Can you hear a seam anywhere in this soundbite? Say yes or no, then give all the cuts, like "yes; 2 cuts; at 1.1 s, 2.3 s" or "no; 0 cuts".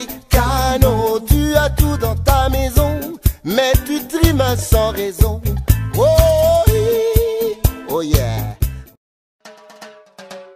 yes; 1 cut; at 9.5 s